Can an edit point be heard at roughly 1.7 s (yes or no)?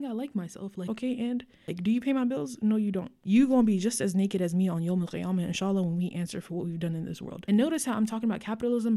yes